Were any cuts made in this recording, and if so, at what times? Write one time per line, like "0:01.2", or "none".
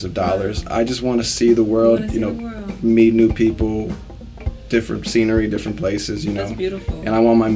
none